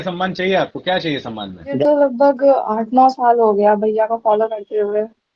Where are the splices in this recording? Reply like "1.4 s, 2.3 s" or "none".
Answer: 1.8 s